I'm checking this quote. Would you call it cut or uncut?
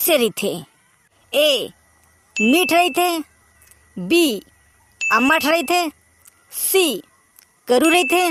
uncut